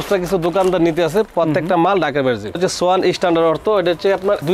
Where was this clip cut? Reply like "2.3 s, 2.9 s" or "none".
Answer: 2.6 s